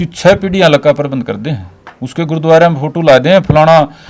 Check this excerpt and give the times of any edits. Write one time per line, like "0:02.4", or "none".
none